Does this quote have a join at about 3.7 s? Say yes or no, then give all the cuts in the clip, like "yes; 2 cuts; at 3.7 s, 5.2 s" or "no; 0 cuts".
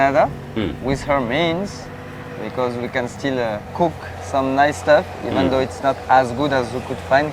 yes; 1 cut; at 3.7 s